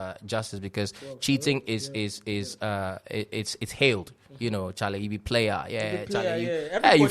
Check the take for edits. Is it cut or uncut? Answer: uncut